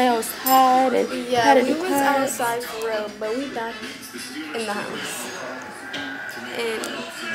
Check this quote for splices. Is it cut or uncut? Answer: uncut